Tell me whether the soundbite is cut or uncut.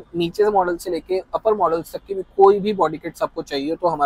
uncut